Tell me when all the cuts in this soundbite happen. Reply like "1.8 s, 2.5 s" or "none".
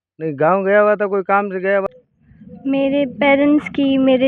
1.8 s